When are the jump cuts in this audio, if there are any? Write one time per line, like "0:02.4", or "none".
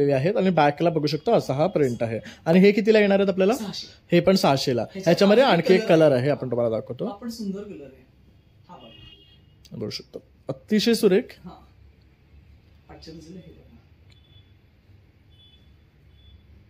none

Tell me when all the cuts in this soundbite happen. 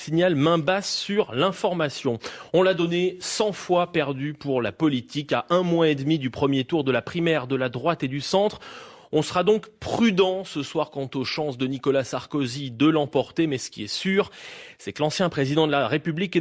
0:07.1

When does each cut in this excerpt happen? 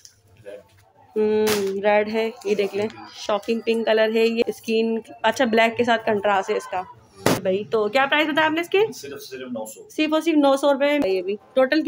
0:04.4
0:07.4
0:11.0

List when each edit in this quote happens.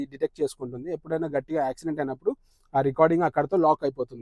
none

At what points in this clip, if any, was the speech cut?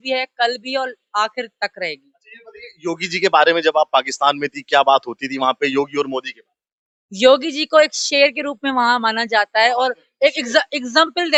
none

